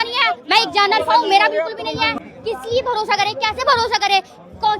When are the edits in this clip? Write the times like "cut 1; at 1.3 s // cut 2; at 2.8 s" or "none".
cut 1; at 2.1 s